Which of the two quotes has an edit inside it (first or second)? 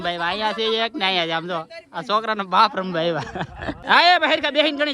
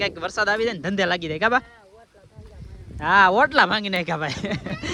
first